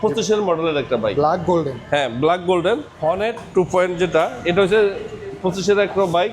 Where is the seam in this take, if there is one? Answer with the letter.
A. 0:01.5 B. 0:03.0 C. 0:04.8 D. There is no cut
B